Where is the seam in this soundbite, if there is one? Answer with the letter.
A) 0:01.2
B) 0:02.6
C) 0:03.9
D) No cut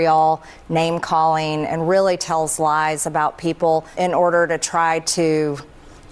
C